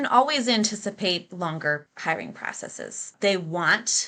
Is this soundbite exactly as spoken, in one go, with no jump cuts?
no; 2 cuts; at 1.9 s, 3.1 s

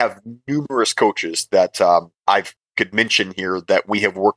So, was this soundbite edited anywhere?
yes; 1 cut; at 2.5 s

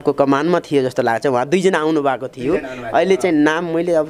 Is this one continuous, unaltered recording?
yes; 0 cuts

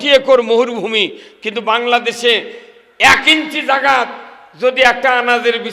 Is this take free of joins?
yes; 0 cuts

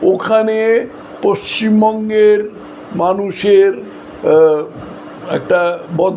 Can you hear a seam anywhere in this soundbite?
no; 0 cuts

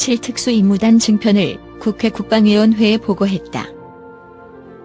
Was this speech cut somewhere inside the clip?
yes; 1 cut; at 3.6 s

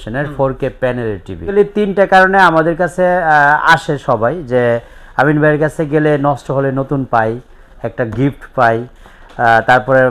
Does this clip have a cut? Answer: yes; 1 cut; at 1.5 s

